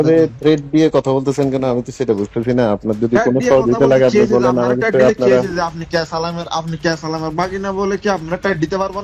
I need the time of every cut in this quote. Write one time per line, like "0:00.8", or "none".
none